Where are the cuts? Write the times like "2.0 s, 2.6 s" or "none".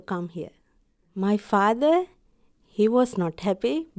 none